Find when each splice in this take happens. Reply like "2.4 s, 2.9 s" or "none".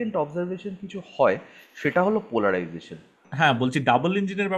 3.2 s

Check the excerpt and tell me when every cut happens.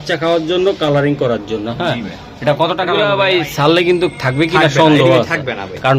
3.0 s

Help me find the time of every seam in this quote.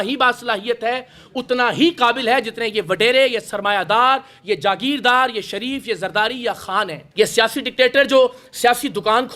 7.0 s

